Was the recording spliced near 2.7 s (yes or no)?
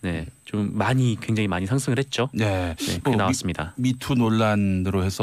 no